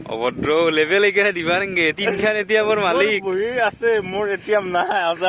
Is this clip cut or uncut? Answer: uncut